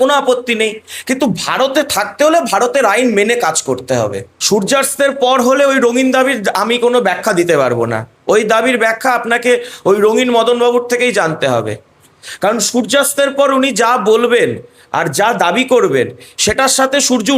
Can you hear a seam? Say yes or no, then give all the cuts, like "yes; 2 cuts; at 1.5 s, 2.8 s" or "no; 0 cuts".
yes; 1 cut; at 4.3 s